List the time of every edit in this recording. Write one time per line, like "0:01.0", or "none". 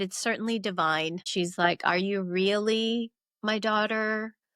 0:01.3